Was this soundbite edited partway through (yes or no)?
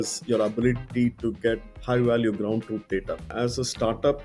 yes